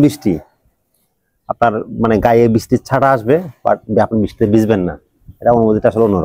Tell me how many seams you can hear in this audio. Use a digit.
0